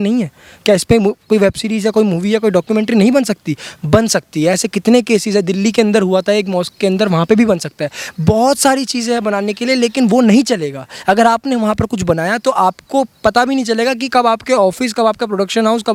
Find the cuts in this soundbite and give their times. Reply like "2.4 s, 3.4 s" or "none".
none